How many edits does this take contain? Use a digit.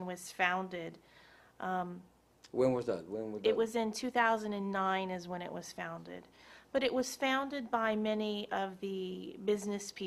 0